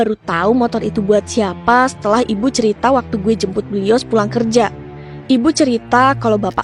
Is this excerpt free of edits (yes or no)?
yes